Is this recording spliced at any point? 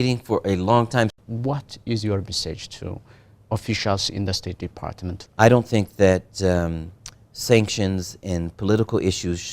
yes; 2 cuts; at 1.1 s, 5.1 s

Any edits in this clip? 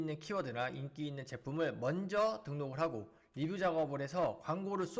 no; 0 cuts

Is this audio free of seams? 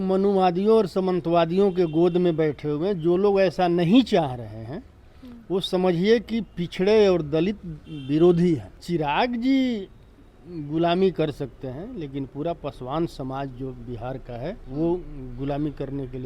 no; 2 cuts; at 8.7 s, 14.6 s

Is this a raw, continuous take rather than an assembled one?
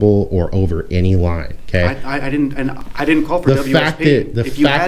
yes; 0 cuts

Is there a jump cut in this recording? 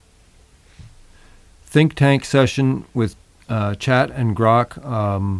no; 0 cuts

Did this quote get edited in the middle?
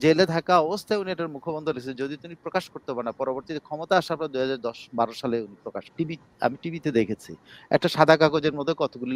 yes; 1 cut; at 5.8 s

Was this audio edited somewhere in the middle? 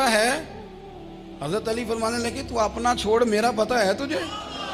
no; 0 cuts

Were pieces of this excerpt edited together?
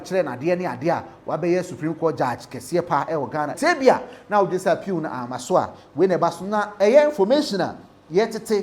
yes; 1 cut; at 3.5 s

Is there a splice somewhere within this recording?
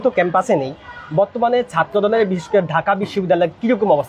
no; 0 cuts

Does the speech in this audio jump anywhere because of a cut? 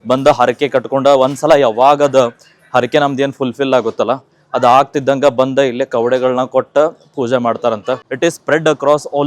yes; 1 cut; at 8.0 s

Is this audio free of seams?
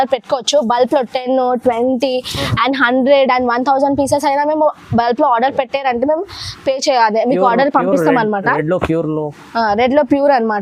yes; 0 cuts

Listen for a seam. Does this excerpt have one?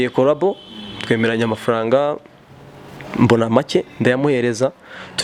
no; 0 cuts

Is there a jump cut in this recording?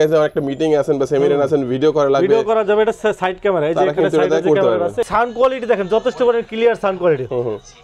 yes; 1 cut; at 5.0 s

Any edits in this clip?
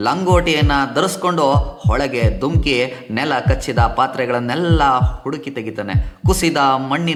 no; 0 cuts

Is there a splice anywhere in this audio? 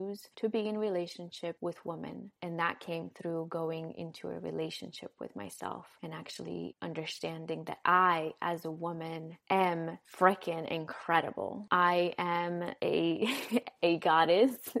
no; 0 cuts

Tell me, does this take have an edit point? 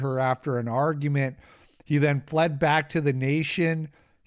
no; 0 cuts

